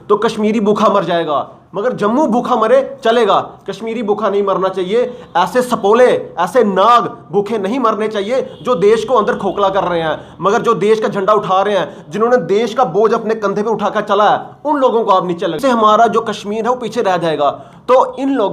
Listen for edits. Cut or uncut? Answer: cut